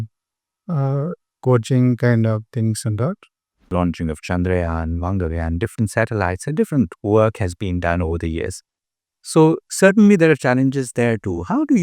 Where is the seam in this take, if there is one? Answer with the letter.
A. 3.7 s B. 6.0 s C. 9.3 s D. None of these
A